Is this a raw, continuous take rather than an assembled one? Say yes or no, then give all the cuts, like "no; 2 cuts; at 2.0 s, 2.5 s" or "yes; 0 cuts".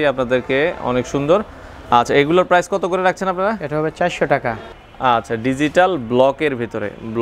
no; 1 cut; at 4.7 s